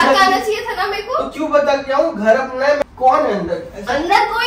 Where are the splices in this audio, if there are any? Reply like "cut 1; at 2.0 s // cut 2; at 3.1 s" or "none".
cut 1; at 2.8 s